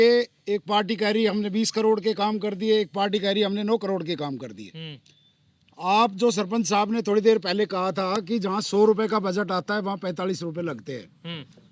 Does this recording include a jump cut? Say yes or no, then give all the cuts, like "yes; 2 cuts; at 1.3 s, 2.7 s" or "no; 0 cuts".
no; 0 cuts